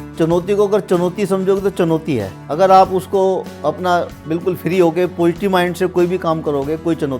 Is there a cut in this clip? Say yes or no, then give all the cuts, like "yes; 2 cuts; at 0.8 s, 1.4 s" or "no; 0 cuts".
yes; 1 cut; at 2.4 s